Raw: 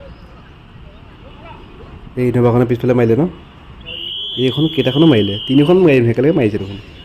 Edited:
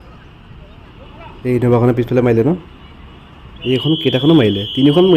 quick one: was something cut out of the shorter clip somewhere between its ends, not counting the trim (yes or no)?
yes